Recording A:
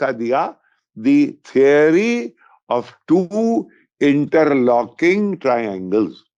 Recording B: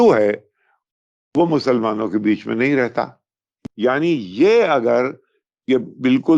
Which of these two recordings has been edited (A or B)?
B